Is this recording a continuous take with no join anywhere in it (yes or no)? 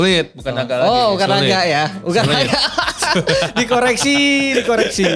yes